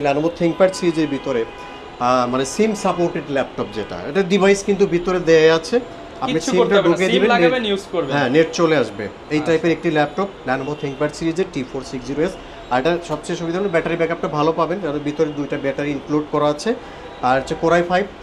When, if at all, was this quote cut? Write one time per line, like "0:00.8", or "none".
none